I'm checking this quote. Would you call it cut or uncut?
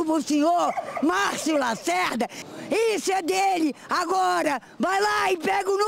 uncut